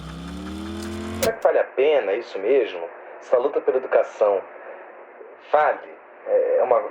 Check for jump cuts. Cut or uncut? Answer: cut